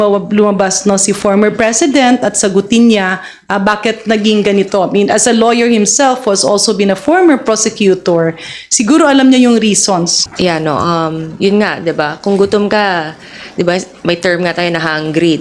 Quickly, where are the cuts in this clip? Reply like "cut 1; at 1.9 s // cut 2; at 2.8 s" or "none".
cut 1; at 10.2 s